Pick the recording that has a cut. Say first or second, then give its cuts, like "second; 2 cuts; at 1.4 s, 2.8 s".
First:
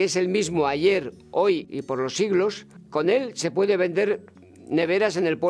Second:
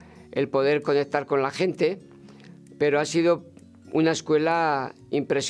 first; 2 cuts; at 1.7 s, 2.7 s